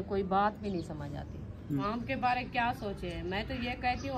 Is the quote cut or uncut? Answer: cut